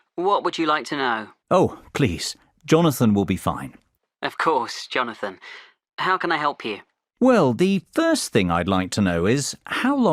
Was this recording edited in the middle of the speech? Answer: no; 0 cuts

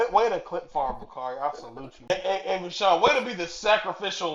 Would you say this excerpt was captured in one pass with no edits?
no; 1 cut; at 2.1 s

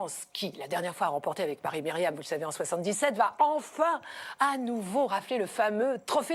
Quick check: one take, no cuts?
yes; 0 cuts

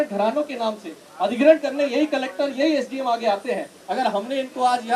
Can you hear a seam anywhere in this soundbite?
yes; 1 cut; at 3.8 s

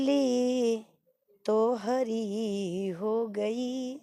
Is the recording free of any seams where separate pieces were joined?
yes; 0 cuts

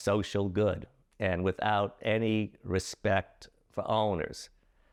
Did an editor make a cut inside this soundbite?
no; 0 cuts

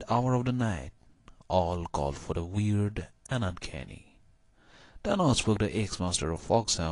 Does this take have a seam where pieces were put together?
yes; 1 cut; at 3.4 s

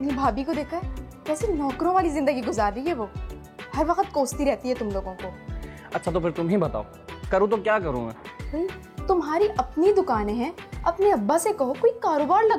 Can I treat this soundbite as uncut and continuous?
yes; 0 cuts

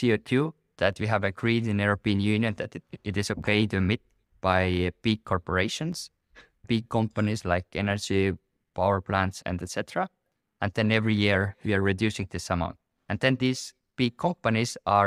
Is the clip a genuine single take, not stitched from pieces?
yes; 0 cuts

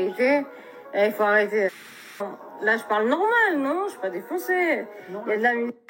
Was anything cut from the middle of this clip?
yes; 1 cut; at 2.2 s

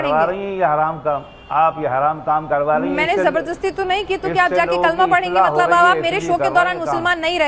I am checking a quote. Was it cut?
no; 0 cuts

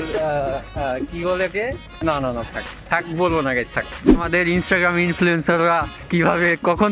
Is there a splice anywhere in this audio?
yes; 2 cuts; at 1.9 s, 4.1 s

